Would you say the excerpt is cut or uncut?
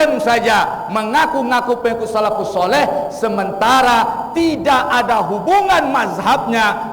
uncut